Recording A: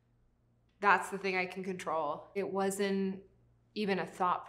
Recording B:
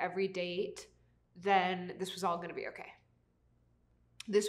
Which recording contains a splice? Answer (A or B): A